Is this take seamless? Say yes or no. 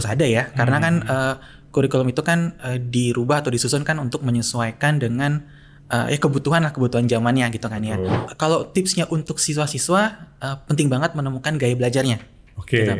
no